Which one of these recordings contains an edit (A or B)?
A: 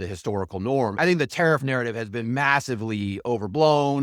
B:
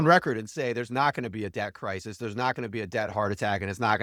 A